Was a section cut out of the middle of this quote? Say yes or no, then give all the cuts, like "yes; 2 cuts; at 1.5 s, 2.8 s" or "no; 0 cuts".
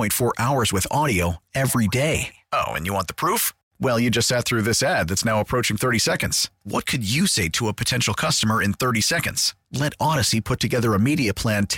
no; 0 cuts